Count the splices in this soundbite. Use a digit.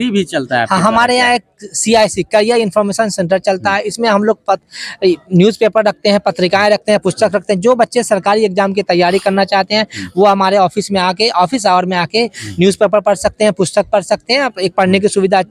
0